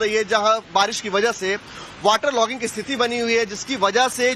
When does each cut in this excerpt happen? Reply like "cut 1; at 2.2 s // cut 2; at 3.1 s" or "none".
cut 1; at 1.0 s